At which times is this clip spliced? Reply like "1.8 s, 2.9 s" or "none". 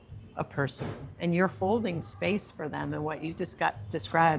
none